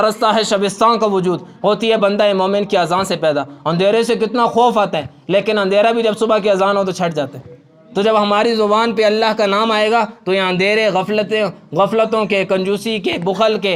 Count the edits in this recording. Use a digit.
0